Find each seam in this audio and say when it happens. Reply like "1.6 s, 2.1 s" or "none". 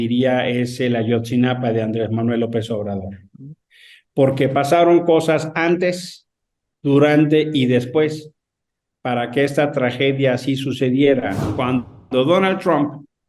11.4 s